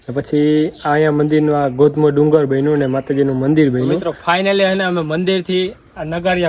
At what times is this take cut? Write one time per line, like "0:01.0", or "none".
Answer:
0:04.1